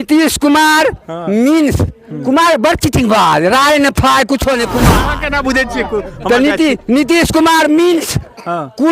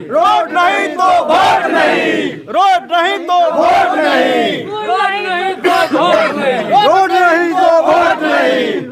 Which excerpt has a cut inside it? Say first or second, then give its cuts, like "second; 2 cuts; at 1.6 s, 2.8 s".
first; 1 cut; at 5.0 s